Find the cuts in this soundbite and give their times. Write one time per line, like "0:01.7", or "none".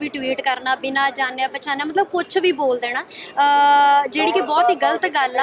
none